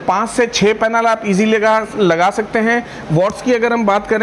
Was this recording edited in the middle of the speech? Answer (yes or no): no